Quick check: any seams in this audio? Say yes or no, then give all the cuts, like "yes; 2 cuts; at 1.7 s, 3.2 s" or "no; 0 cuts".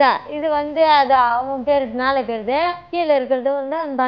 yes; 1 cut; at 2.8 s